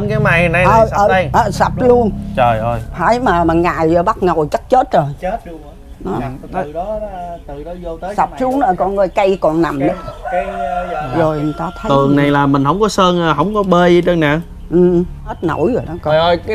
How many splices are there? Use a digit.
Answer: 1